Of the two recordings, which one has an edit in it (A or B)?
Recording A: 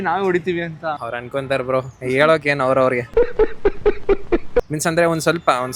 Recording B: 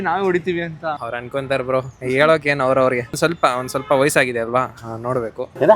B